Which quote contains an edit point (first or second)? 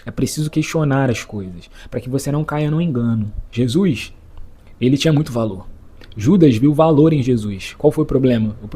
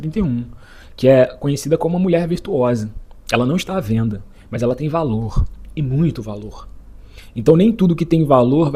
first